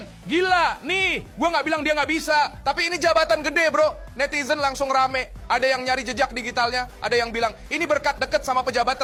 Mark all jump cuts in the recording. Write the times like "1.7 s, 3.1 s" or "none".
none